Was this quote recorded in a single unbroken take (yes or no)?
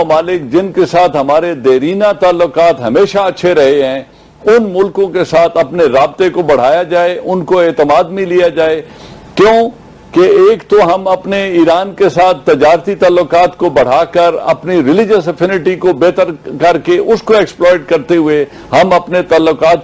yes